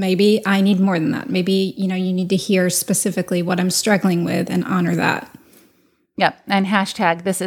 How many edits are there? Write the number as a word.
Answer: zero